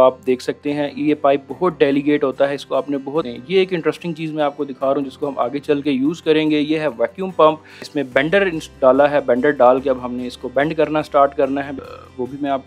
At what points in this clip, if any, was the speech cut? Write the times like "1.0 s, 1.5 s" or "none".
3.4 s, 7.9 s, 11.8 s